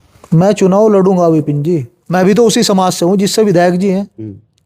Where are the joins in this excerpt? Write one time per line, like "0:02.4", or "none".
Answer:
0:01.9